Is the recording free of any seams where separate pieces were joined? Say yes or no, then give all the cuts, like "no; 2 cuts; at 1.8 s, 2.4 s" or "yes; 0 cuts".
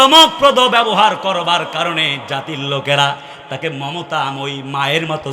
yes; 0 cuts